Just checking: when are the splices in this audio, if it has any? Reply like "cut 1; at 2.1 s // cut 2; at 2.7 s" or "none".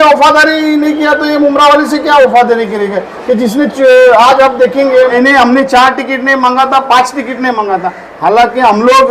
cut 1; at 5.1 s